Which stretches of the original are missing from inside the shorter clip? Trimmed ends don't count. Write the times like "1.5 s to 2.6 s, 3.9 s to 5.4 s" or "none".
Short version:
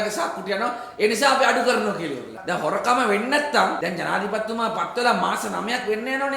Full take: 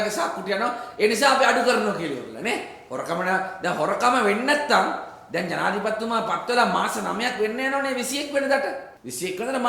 2.3 s to 3.5 s, 4.9 s to 5.3 s